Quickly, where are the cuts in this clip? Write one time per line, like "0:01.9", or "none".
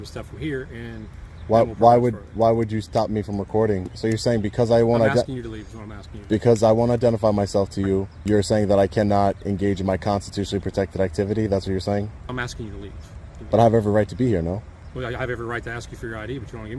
0:03.9
0:08.1
0:12.3
0:13.4
0:14.8

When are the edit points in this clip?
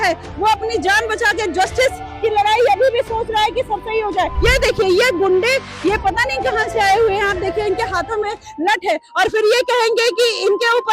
0:04.3

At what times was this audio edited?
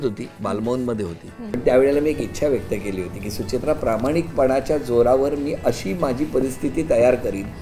0:01.6

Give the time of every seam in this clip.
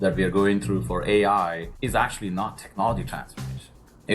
0:01.7

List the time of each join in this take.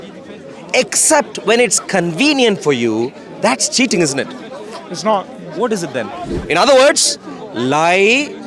0:06.3

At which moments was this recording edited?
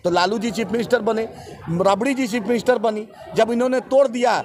none

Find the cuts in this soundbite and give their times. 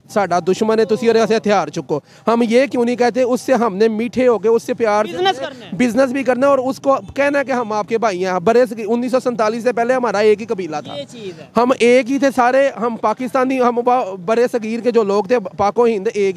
none

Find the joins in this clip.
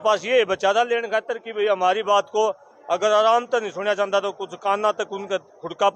none

